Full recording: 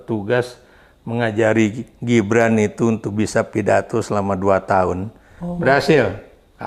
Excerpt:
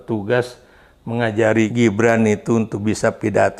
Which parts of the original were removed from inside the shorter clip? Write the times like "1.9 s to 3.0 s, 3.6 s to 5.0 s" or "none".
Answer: 1.7 s to 2.0 s